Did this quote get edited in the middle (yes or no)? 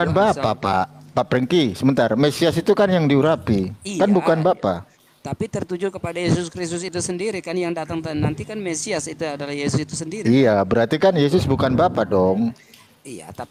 no